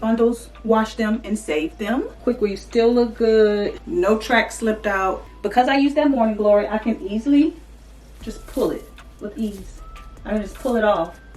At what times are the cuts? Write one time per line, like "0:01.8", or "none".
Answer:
0:02.1
0:03.8
0:05.2
0:09.0